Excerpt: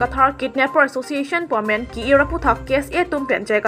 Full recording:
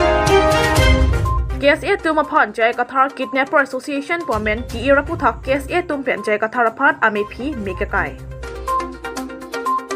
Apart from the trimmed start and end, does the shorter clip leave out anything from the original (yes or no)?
no